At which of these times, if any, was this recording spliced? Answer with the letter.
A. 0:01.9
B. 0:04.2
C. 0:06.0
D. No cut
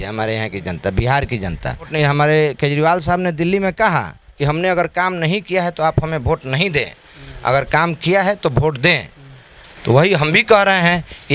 A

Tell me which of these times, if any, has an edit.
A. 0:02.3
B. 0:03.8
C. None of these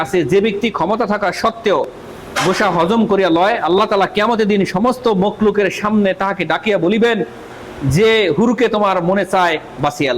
B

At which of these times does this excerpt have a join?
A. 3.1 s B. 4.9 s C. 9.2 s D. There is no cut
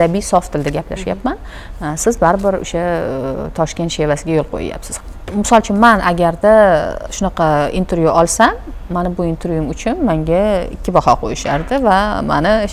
B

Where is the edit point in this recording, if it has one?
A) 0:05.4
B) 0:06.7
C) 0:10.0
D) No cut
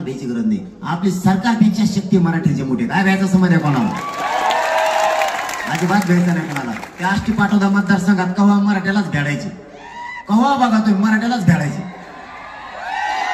D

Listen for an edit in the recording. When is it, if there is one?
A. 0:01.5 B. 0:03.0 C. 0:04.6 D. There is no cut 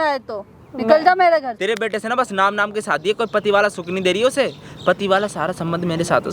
A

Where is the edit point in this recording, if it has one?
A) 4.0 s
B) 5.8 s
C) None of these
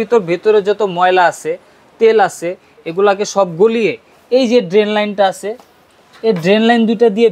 C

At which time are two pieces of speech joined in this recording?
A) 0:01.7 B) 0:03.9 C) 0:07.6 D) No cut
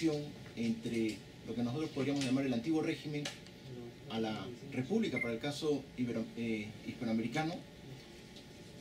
B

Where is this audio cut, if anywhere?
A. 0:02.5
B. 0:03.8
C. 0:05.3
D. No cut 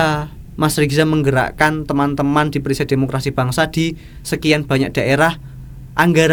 D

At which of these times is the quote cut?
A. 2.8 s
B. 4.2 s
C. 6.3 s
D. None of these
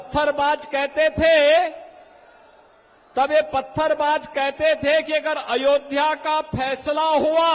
D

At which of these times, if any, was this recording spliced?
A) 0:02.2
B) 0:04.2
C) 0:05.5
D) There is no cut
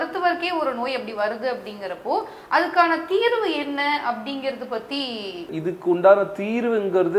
C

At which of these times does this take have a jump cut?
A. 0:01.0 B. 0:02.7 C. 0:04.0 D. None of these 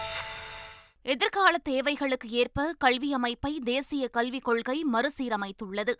A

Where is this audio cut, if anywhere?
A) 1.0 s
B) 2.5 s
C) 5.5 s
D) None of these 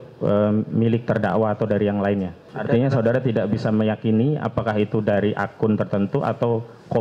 B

